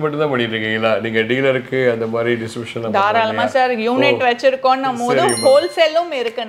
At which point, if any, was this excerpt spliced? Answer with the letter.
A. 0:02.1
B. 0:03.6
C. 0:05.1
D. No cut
D